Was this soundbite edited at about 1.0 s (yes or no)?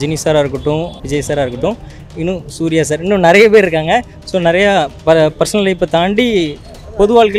yes